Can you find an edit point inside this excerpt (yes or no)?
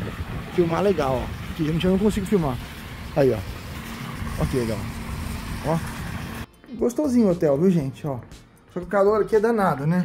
yes